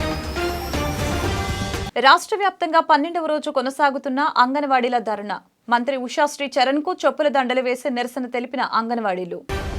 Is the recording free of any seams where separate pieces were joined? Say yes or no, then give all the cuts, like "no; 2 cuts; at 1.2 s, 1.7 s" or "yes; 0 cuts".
yes; 0 cuts